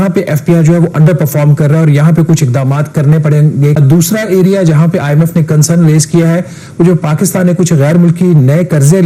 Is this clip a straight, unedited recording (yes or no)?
no